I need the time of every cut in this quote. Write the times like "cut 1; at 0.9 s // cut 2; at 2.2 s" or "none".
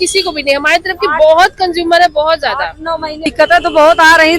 cut 1; at 3.3 s